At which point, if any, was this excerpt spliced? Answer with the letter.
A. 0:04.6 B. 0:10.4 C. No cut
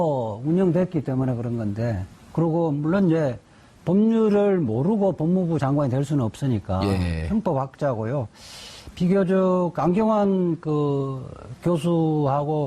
A